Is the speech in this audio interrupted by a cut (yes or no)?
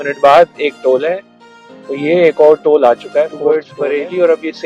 yes